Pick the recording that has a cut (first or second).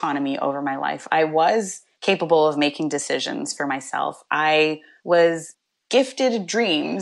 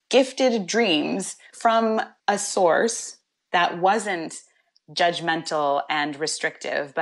second